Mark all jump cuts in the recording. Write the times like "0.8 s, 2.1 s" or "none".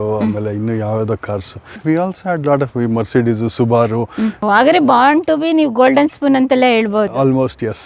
1.7 s, 4.4 s